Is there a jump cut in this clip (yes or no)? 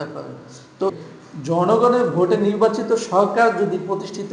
yes